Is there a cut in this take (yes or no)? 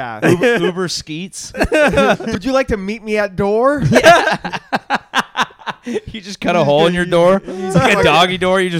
yes